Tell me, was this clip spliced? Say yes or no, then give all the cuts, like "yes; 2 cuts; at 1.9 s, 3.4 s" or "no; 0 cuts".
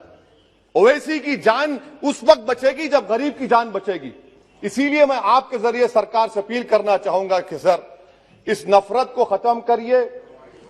no; 0 cuts